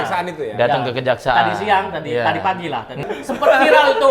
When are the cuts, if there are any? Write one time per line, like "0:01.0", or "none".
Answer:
0:03.1